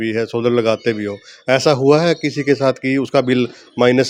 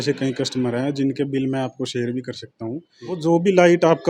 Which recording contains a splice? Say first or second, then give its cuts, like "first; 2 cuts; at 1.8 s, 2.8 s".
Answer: second; 1 cut; at 3.2 s